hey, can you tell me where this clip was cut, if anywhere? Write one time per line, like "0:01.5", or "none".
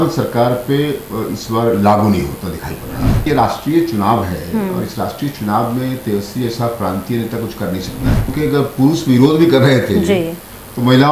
0:03.3
0:08.3